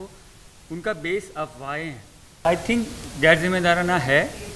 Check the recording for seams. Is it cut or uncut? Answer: cut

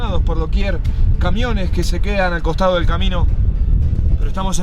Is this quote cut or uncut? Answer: uncut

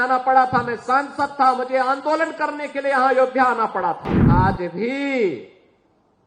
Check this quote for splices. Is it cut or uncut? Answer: cut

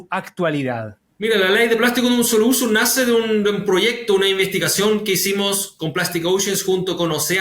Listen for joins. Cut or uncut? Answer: cut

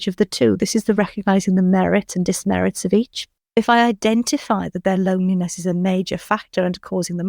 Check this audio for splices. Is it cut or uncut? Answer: cut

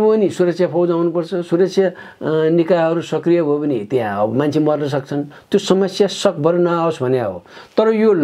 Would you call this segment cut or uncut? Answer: uncut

